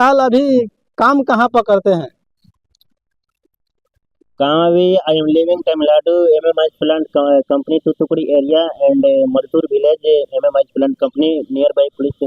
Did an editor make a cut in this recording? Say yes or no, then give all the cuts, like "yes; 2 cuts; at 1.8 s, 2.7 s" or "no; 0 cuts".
no; 0 cuts